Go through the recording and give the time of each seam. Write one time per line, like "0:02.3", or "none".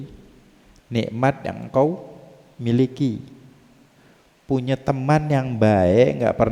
none